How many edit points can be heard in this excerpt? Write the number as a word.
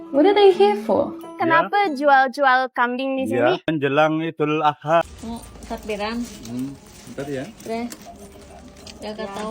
one